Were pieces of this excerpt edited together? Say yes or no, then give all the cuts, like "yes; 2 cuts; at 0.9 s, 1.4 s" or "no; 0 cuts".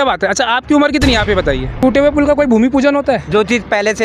yes; 1 cut; at 1.8 s